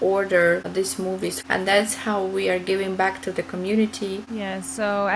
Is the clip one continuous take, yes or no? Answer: no